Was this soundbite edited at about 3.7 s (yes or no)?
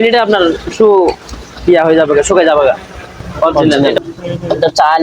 yes